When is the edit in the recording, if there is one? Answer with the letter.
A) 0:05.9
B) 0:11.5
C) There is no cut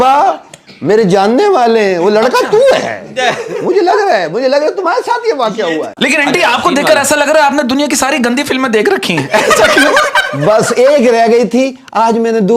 A